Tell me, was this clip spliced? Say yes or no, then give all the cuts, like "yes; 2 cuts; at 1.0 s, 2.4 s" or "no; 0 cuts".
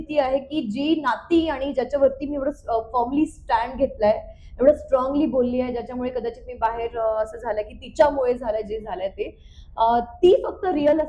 no; 0 cuts